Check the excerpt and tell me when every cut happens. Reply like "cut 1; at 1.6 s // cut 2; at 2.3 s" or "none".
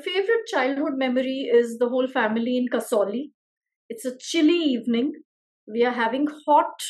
none